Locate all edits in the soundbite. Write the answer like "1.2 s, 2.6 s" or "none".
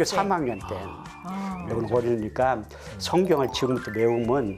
1.6 s

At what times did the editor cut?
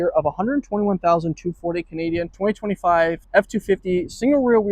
2.3 s, 3.2 s

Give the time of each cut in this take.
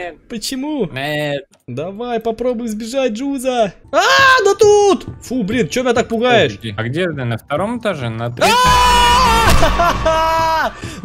1.6 s, 3.8 s, 6.7 s

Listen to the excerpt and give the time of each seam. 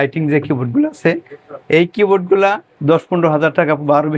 2.7 s

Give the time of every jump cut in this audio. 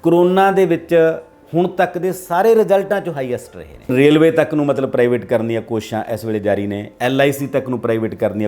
3.9 s

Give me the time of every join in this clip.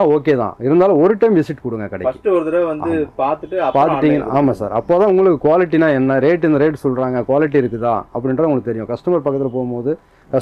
none

